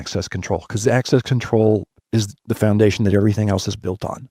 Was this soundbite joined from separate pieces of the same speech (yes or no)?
no